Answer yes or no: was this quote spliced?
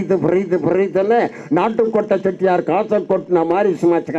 no